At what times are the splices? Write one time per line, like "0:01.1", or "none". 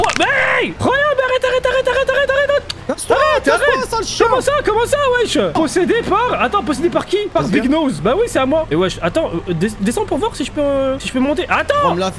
0:05.5